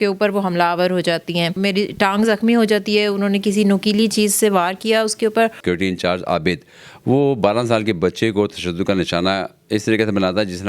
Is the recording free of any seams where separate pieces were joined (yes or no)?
no